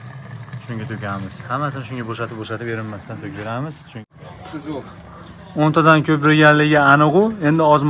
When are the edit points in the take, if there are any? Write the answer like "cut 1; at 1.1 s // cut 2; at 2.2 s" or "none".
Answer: cut 1; at 4.0 s